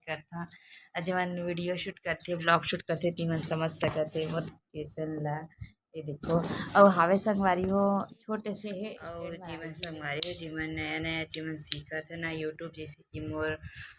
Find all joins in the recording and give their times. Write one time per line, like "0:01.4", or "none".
0:09.3